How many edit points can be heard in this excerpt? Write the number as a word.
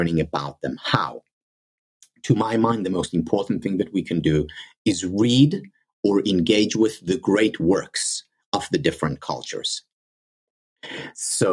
zero